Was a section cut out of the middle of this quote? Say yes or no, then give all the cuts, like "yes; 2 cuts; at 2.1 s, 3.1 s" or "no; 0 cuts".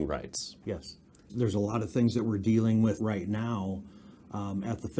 yes; 2 cuts; at 1.3 s, 3.0 s